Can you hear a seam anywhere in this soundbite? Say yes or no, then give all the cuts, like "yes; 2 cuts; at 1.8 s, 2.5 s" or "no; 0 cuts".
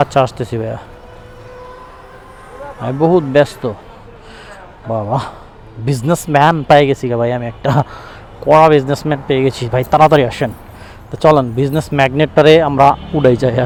no; 0 cuts